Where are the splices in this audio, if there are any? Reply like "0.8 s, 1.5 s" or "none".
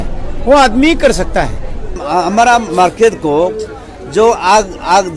1.9 s